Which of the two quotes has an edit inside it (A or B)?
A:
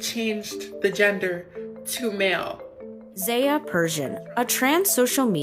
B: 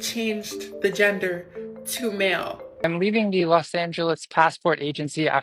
B